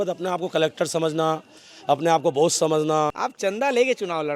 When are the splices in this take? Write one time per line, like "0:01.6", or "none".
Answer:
0:03.2